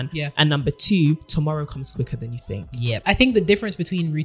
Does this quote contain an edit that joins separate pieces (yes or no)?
yes